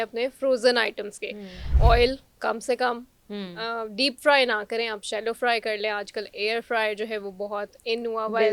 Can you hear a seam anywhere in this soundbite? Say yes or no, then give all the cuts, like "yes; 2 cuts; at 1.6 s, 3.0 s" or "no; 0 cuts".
yes; 1 cut; at 1.7 s